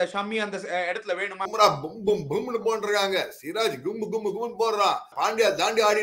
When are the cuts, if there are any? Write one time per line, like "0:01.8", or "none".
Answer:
0:01.5
0:05.1